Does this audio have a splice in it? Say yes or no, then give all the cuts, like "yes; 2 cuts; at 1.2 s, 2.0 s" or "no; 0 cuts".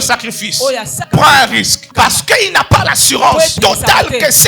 yes; 3 cuts; at 0.9 s, 1.8 s, 3.5 s